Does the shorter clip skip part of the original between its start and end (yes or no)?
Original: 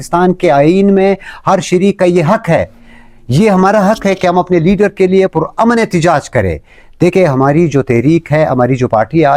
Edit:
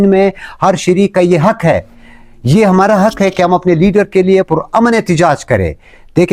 no